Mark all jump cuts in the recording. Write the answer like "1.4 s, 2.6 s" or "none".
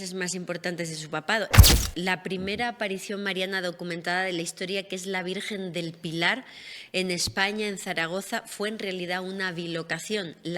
1.8 s